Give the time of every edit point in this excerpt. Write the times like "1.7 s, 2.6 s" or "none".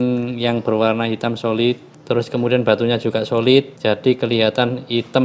1.9 s, 3.7 s